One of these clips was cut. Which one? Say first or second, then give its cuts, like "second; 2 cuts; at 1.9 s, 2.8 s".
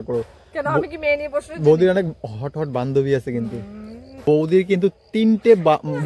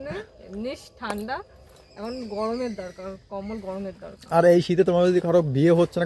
first; 1 cut; at 4.1 s